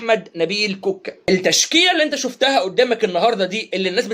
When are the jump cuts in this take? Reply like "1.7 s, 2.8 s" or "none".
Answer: 1.1 s